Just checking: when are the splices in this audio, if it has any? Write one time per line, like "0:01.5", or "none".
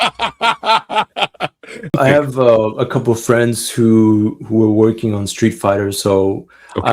0:02.0